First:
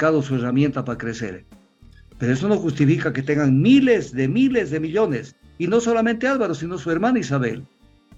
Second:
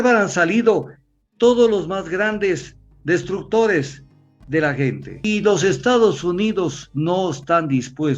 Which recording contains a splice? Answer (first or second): second